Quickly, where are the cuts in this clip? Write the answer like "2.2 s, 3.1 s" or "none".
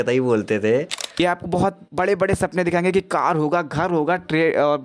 1.0 s